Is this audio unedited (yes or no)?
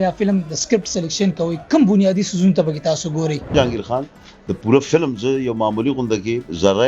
no